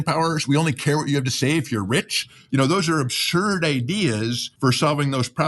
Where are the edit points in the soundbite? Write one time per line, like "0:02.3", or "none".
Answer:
0:04.4